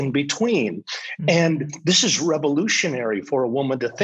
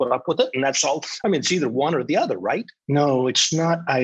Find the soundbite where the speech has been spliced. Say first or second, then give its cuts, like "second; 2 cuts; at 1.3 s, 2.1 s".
second; 1 cut; at 2.7 s